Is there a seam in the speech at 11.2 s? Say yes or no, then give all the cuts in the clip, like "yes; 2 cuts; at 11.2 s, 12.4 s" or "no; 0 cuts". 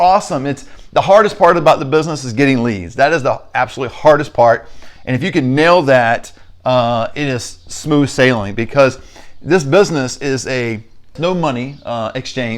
yes; 1 cut; at 11.2 s